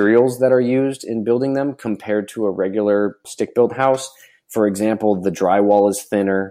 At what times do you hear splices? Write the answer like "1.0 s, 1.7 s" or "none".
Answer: none